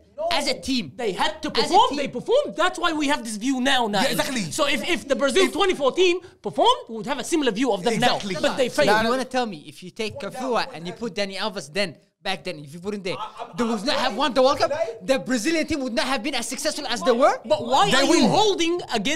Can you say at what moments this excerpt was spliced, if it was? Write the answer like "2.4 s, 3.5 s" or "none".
9.0 s, 17.4 s